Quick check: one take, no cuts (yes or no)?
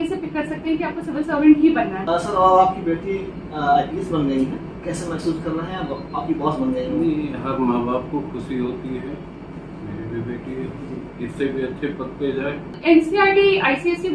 no